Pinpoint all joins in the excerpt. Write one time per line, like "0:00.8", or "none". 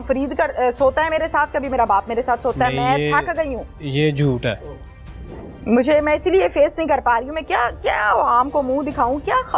none